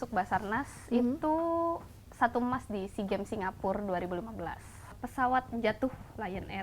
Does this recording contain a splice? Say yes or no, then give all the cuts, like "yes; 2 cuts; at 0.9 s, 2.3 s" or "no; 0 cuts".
yes; 1 cut; at 4.9 s